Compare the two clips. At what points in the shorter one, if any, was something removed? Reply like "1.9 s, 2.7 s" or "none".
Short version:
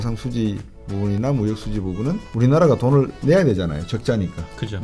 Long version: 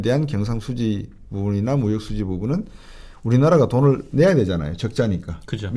2.3 s